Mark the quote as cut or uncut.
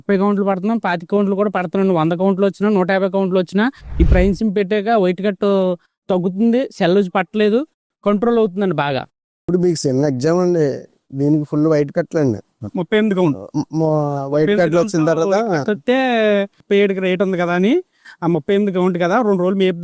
uncut